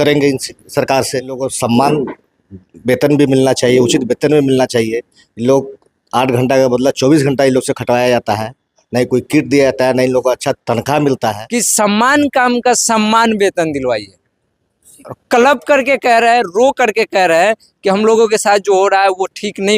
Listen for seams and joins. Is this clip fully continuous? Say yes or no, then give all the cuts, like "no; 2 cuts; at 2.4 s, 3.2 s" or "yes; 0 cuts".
no; 2 cuts; at 1.5 s, 11.4 s